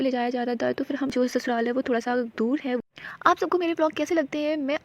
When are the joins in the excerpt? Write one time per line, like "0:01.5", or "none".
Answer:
0:01.1